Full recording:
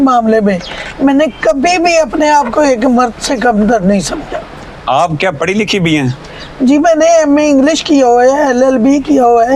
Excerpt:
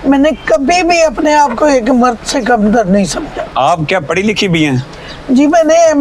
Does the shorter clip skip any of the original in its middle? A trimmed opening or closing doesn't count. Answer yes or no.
yes